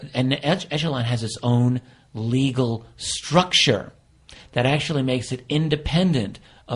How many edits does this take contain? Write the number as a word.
one